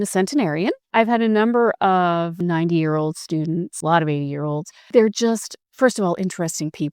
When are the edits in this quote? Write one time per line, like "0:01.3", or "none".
0:00.8
0:02.4
0:03.7
0:04.9